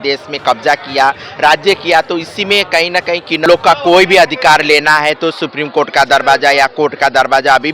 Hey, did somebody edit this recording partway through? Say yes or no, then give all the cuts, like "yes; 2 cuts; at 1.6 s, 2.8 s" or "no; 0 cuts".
yes; 1 cut; at 3.5 s